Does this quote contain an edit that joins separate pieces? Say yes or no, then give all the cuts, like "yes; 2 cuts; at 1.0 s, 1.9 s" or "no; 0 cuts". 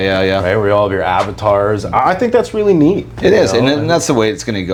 no; 0 cuts